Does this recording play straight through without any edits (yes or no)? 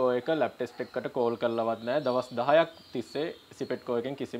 yes